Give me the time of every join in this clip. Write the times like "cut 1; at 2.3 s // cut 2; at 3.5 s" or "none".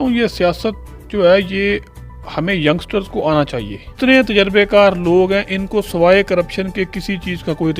cut 1; at 3.9 s